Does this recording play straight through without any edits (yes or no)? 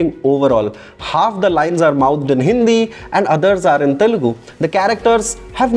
yes